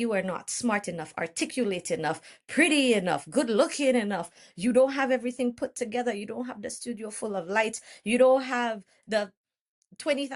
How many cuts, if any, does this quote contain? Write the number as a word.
zero